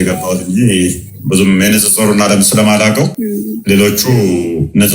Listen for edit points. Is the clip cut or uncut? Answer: cut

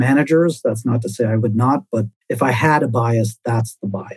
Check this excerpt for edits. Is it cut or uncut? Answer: cut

